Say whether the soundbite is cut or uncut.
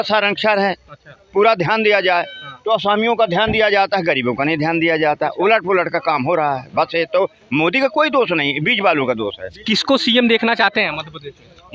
cut